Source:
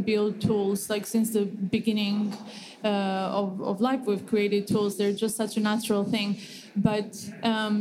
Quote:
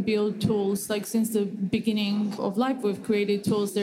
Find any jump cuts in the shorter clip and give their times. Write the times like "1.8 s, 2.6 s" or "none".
2.4 s